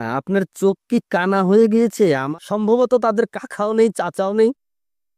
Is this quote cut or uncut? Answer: cut